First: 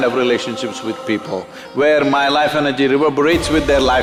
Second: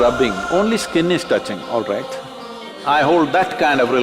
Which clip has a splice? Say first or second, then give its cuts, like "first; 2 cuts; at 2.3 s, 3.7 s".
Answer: second; 1 cut; at 2.7 s